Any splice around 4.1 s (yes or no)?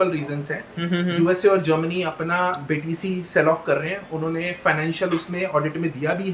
no